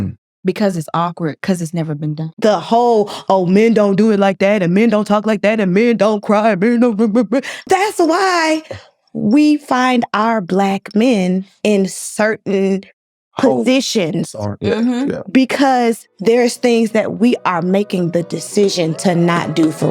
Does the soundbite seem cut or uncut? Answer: cut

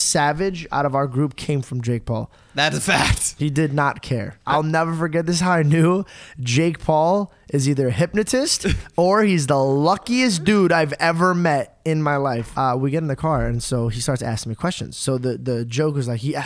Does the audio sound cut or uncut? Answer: cut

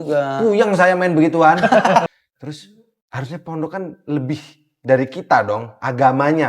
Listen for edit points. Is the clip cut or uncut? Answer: cut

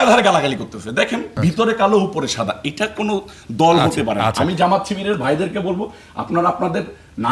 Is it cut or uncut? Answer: cut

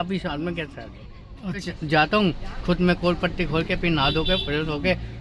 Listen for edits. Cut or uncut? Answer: cut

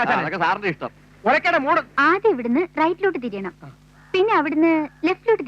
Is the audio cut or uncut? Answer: cut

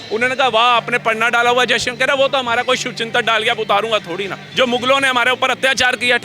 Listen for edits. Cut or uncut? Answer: cut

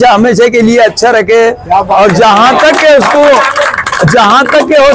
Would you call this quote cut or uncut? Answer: uncut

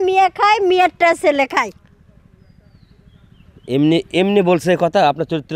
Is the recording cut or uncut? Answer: uncut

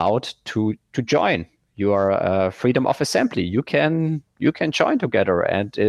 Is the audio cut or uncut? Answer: uncut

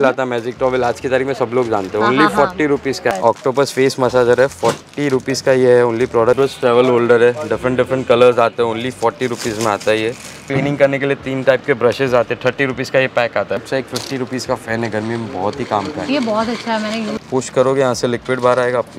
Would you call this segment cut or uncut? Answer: cut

